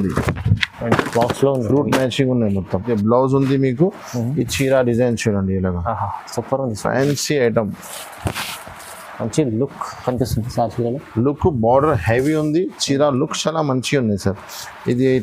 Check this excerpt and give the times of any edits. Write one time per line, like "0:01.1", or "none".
0:02.9